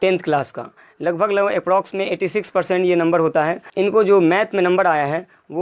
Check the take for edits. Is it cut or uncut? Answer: cut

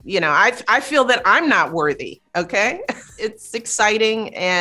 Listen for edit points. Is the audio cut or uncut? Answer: cut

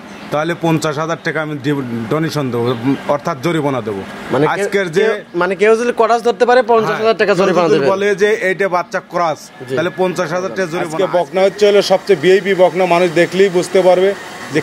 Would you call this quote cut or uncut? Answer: cut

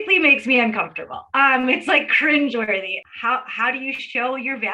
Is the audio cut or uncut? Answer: cut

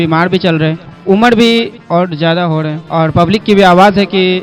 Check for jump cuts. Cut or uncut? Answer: cut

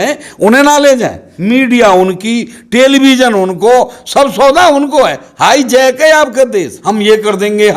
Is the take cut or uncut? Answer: cut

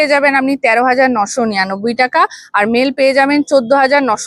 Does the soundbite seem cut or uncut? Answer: uncut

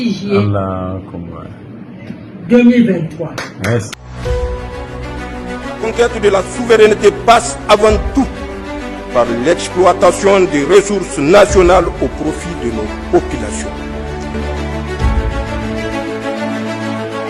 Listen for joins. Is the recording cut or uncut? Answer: cut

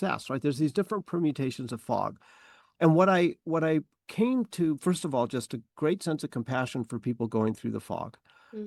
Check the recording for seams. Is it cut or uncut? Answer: uncut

